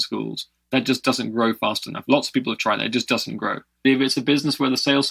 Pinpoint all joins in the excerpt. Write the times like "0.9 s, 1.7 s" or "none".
3.8 s